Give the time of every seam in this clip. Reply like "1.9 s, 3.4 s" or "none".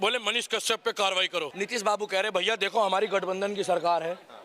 1.5 s